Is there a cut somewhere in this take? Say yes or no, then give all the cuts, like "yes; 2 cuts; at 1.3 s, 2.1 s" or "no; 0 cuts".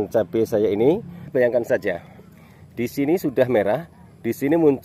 yes; 1 cut; at 1.3 s